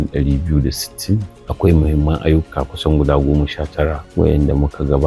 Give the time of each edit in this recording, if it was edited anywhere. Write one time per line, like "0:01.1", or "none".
0:01.4
0:04.0